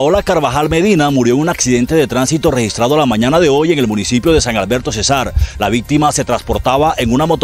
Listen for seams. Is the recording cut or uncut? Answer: uncut